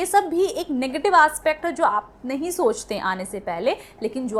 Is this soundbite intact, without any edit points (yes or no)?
yes